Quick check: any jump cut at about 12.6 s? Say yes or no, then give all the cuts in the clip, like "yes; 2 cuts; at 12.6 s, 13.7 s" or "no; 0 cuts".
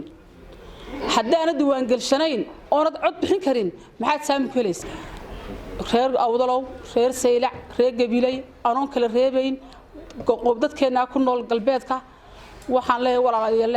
no; 1 cut; at 4.8 s